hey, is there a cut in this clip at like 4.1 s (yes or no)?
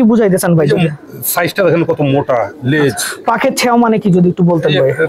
no